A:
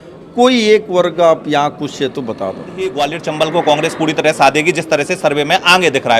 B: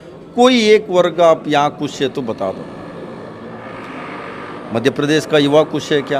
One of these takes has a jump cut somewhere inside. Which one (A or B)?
A